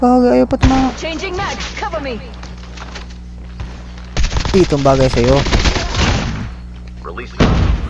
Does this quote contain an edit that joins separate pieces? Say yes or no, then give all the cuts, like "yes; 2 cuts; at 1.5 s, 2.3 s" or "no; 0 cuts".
no; 0 cuts